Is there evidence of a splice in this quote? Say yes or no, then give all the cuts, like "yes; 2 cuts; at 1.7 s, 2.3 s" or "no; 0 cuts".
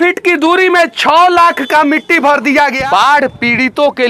yes; 1 cut; at 2.8 s